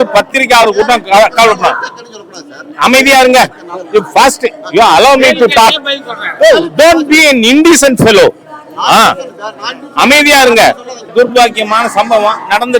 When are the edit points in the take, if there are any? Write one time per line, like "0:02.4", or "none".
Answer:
0:11.1